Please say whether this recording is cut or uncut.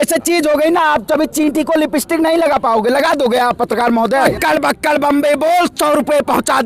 cut